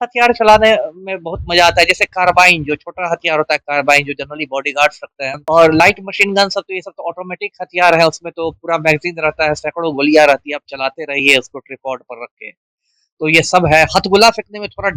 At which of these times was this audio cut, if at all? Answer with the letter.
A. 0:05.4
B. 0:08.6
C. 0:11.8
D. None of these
A